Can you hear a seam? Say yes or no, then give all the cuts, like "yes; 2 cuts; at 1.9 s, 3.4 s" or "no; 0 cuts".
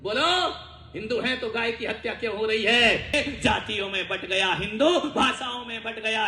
yes; 1 cut; at 3.1 s